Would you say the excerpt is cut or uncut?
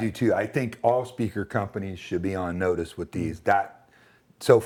uncut